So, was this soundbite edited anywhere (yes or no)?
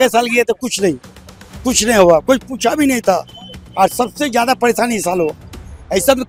no